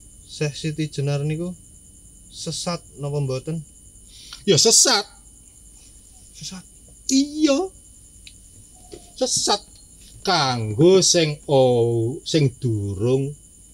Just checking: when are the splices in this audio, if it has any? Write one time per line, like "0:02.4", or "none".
none